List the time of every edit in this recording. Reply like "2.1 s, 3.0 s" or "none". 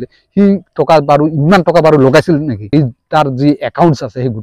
2.7 s